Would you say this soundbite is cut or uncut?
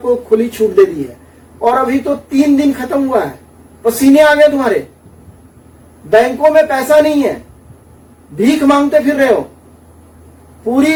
uncut